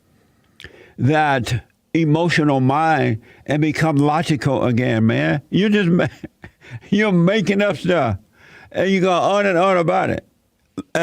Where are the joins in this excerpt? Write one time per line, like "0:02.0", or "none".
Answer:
none